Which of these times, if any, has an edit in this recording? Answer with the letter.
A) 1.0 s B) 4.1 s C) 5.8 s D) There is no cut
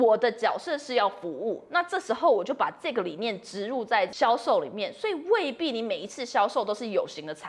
B